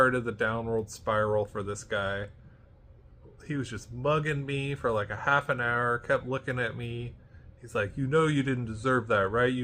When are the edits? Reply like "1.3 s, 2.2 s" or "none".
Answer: none